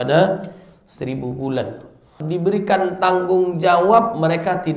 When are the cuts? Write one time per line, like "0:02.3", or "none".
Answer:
0:02.2